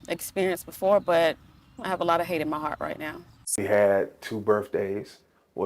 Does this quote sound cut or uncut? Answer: cut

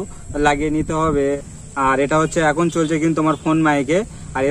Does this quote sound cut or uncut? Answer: cut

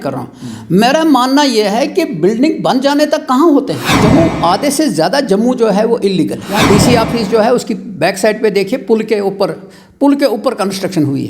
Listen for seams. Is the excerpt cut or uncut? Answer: cut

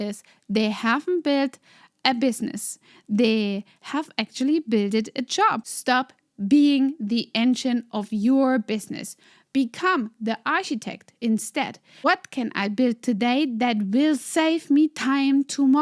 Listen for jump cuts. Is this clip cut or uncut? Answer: cut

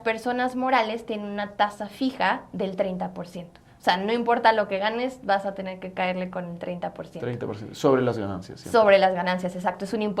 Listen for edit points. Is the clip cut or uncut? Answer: uncut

